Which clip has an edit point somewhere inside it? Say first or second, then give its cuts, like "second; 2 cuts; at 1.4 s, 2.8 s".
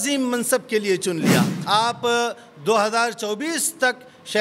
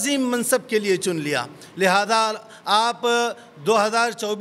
first; 1 cut; at 1.5 s